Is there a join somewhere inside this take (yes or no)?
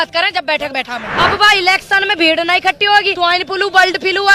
yes